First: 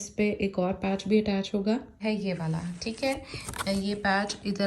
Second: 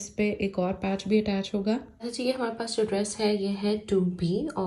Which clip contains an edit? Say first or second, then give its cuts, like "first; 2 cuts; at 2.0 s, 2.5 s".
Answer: second; 1 cut; at 1.9 s